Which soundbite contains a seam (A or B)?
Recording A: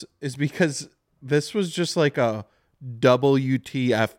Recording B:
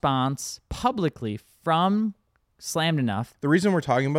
B